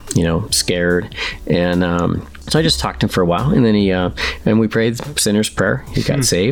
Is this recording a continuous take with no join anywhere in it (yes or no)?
no